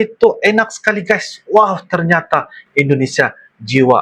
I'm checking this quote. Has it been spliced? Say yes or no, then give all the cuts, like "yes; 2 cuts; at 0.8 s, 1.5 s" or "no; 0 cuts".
no; 0 cuts